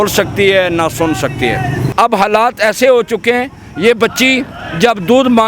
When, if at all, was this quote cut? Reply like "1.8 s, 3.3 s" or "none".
1.8 s